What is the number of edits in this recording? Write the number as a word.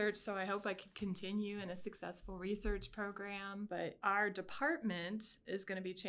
one